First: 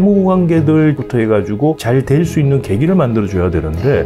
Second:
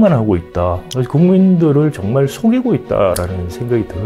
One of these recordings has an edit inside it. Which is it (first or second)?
first